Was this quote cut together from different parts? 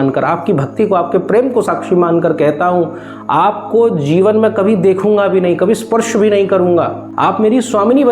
yes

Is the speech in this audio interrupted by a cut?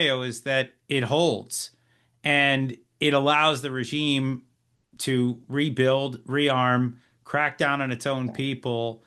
no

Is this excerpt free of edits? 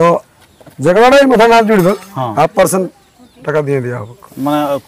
yes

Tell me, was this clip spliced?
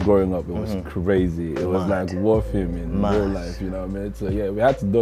no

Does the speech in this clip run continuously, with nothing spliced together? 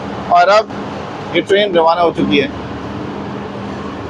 yes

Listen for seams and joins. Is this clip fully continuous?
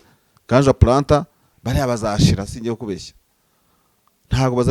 yes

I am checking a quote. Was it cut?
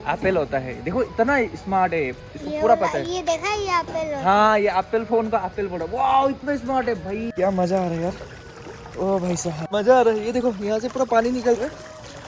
yes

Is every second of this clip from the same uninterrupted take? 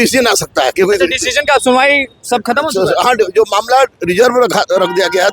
yes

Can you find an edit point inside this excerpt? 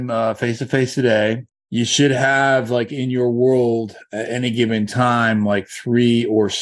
yes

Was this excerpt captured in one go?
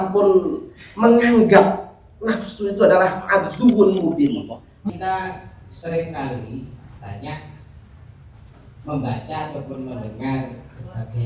no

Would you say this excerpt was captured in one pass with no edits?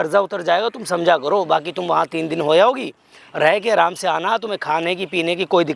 yes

